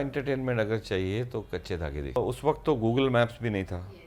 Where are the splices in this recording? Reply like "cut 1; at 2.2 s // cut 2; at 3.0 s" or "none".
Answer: cut 1; at 2.2 s